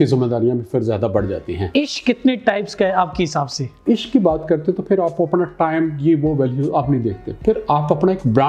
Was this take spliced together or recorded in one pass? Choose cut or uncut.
cut